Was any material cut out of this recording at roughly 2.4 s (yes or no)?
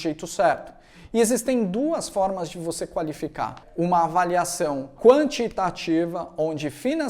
no